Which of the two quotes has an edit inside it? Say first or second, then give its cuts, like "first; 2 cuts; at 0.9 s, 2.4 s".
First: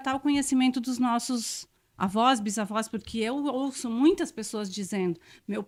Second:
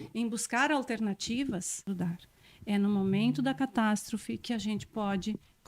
second; 1 cut; at 1.9 s